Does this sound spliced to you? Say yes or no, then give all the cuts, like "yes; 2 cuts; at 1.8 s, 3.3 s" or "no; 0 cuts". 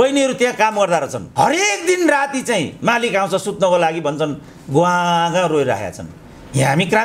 no; 0 cuts